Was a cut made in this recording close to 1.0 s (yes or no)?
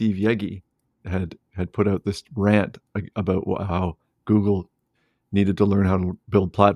yes